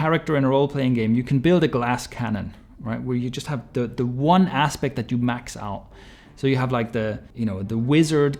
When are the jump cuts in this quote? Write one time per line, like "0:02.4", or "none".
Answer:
0:07.2